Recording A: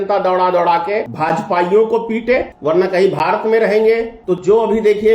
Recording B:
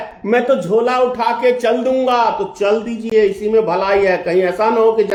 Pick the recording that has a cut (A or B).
A